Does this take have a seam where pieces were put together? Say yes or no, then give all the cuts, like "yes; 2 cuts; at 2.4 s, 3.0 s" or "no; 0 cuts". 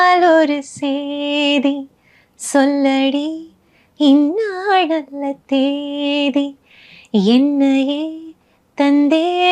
no; 0 cuts